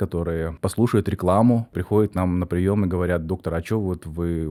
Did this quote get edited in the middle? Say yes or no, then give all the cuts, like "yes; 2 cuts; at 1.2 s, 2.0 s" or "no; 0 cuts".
no; 0 cuts